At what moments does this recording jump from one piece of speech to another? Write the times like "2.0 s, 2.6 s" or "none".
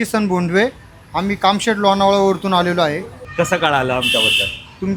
none